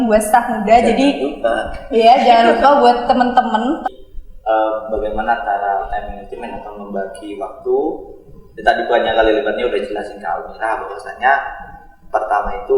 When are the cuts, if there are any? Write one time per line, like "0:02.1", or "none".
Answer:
0:03.8